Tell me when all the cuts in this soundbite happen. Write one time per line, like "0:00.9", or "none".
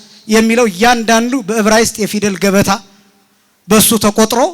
none

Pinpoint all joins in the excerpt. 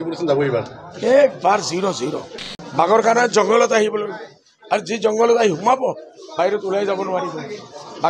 0:02.3

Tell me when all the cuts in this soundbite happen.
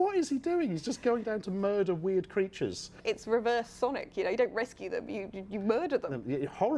0:03.0

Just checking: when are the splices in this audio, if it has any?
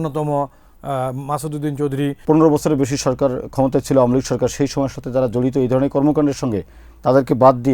0:02.2

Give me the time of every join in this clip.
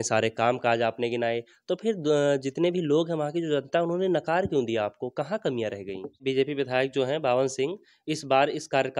0:06.2

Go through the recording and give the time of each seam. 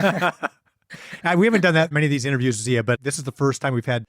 0:01.9
0:03.0

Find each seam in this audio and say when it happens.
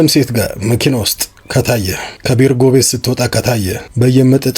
0:02.1
0:03.5

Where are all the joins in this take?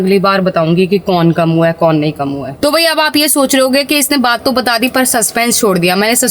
none

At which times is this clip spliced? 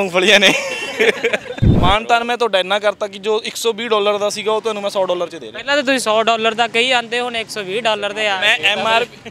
0:01.7

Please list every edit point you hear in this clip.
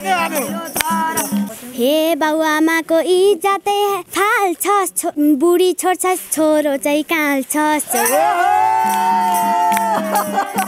0:01.5
0:04.1
0:05.1

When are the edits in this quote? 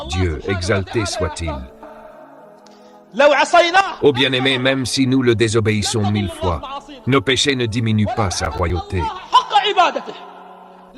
none

